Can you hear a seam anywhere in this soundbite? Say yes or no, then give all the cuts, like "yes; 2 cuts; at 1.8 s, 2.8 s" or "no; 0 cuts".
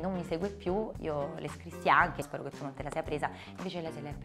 yes; 2 cuts; at 0.9 s, 2.2 s